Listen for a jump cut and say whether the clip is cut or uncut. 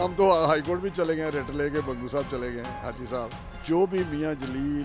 cut